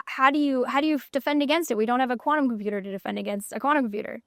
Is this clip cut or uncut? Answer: uncut